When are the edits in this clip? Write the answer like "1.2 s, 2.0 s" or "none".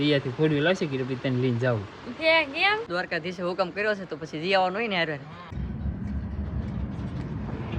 2.8 s, 5.6 s